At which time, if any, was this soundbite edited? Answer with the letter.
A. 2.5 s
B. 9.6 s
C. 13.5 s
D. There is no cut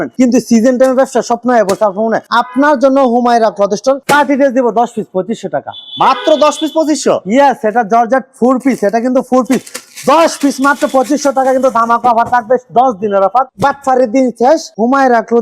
C